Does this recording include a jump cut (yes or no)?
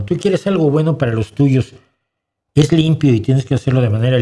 no